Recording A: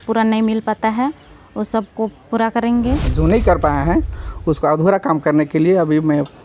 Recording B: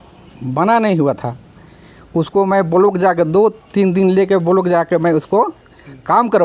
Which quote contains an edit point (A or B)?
A